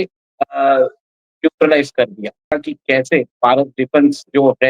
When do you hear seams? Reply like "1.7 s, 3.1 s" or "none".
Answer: 2.5 s